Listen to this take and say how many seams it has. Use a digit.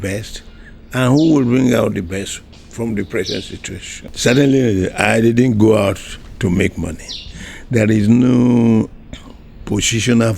1